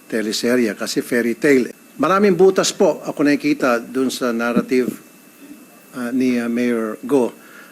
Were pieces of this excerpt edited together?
yes; 1 cut; at 1.8 s

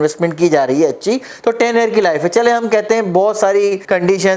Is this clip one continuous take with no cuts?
yes; 0 cuts

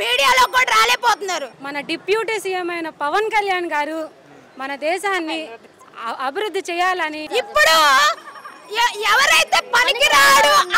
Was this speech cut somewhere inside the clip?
yes; 2 cuts; at 1.6 s, 7.3 s

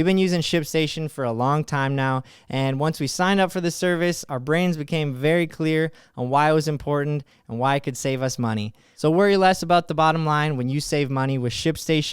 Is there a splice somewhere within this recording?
yes; 1 cut; at 8.8 s

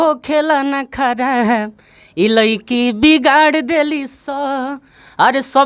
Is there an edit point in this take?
no; 0 cuts

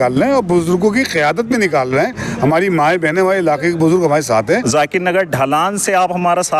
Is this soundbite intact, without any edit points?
no; 1 cut; at 4.4 s

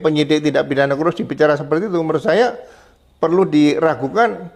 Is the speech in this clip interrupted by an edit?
no; 0 cuts

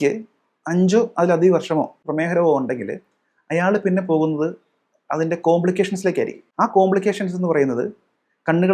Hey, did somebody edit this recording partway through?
yes; 2 cuts; at 2.1 s, 6.4 s

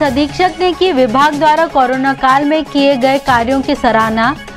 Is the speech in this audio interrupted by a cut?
no; 0 cuts

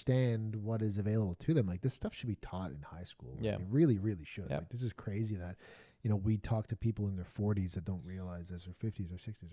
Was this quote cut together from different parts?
no; 0 cuts

